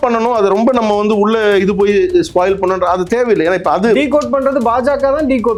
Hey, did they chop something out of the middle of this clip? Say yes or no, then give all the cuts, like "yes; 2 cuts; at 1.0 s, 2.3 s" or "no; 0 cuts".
no; 0 cuts